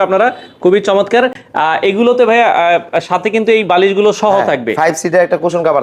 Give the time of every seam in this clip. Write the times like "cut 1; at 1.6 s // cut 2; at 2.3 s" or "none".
none